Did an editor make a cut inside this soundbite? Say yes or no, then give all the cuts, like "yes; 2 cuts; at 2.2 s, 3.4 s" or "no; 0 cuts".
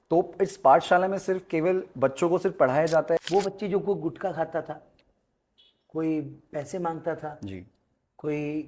yes; 1 cut; at 3.2 s